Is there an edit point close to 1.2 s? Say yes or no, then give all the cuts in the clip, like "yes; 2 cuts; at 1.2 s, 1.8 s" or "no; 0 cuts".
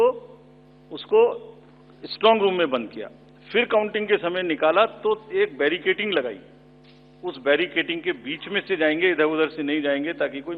no; 0 cuts